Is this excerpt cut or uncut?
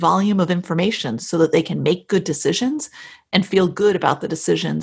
uncut